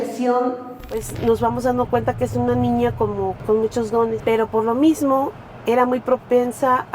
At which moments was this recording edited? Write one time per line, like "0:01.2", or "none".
0:01.1
0:03.4
0:04.2